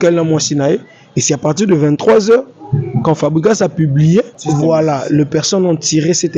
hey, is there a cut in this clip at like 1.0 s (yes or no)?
no